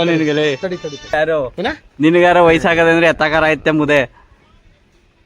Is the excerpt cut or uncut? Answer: cut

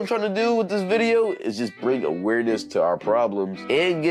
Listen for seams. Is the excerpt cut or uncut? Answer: uncut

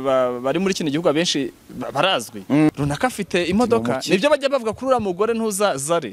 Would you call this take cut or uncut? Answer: cut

